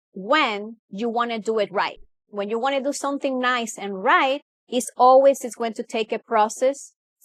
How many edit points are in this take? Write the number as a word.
zero